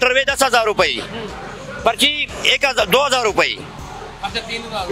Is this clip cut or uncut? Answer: uncut